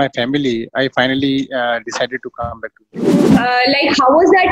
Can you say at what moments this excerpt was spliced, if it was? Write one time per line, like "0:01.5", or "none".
0:03.3